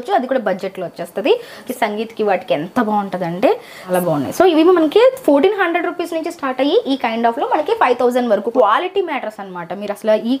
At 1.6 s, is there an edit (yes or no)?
yes